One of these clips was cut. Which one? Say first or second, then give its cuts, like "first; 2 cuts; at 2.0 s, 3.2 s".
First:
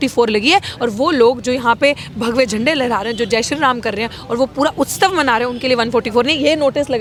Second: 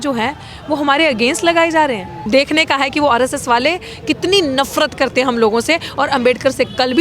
second; 1 cut; at 2.3 s